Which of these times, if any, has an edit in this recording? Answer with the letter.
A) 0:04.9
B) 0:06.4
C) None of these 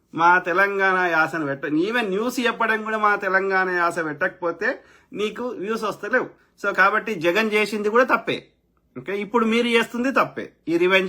B